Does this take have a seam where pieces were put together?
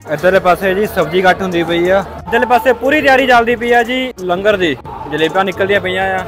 yes; 2 cuts; at 2.3 s, 4.1 s

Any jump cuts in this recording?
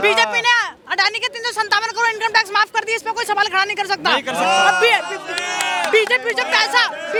no; 0 cuts

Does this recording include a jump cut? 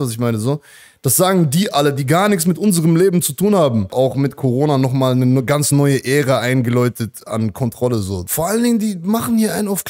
yes; 2 cuts; at 3.9 s, 8.2 s

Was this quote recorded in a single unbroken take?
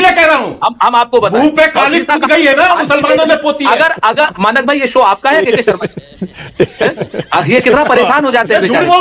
no; 1 cut; at 4.3 s

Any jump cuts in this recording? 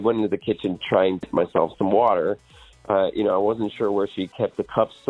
yes; 1 cut; at 1.2 s

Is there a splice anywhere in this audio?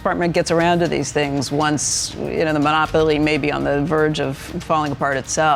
no; 0 cuts

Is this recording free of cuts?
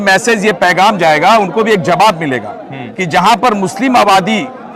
yes; 0 cuts

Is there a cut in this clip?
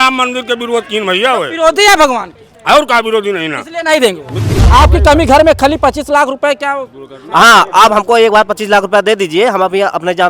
yes; 1 cut; at 4.6 s

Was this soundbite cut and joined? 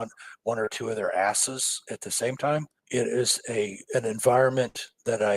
yes; 1 cut; at 2.8 s

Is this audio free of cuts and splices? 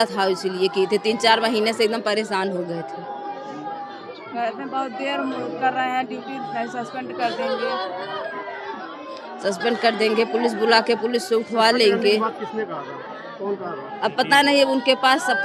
yes; 0 cuts

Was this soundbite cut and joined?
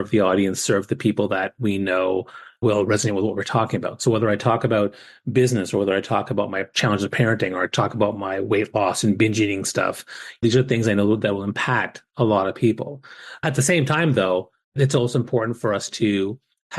yes; 5 cuts; at 2.6 s, 6.7 s, 10.4 s, 13.4 s, 14.8 s

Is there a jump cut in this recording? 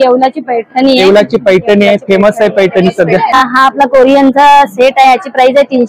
yes; 1 cut; at 3.4 s

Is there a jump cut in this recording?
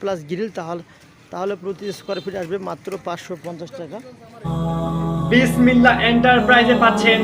yes; 1 cut; at 4.4 s

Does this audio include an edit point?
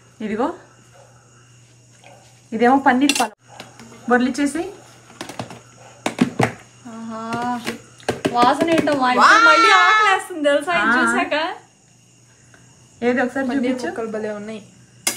yes; 1 cut; at 3.3 s

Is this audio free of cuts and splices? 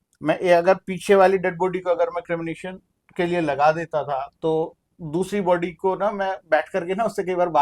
yes; 0 cuts

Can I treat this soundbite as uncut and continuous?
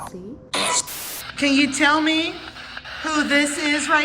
no; 1 cut; at 1.0 s

